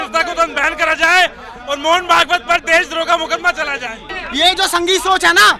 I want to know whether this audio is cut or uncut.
cut